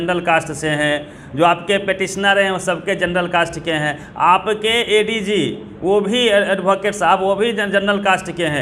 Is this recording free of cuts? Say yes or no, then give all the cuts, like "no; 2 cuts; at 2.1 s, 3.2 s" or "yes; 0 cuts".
yes; 0 cuts